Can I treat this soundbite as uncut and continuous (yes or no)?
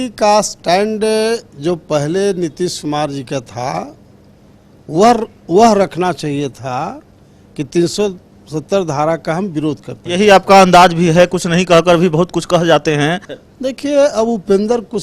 no